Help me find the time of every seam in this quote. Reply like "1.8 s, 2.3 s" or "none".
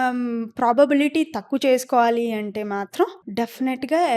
3.2 s